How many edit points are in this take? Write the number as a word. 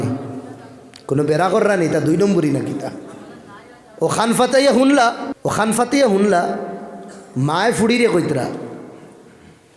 one